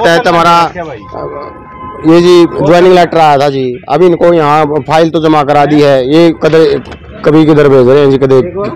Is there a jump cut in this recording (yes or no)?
no